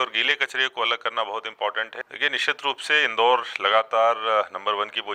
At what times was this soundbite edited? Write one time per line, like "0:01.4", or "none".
0:02.0

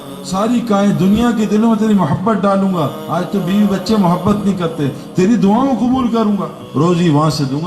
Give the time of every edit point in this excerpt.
0:06.6

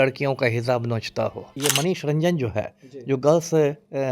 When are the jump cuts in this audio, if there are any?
0:01.5

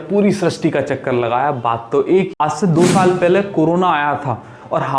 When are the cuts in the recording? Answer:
0:02.3

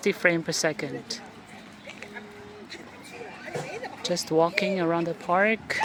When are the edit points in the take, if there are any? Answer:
none

